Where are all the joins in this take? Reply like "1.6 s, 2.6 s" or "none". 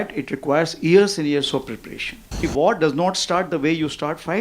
2.4 s